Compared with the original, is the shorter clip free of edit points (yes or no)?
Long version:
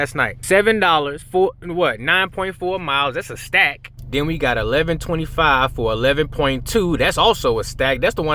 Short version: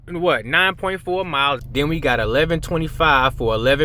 no